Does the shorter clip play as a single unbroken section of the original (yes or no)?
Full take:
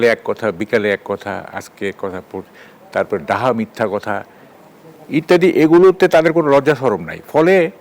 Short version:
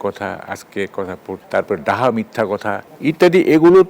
no